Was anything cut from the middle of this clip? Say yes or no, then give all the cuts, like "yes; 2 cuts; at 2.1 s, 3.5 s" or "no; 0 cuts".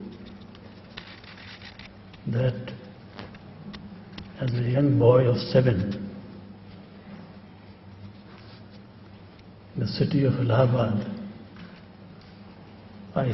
no; 0 cuts